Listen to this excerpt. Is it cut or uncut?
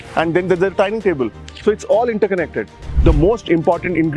cut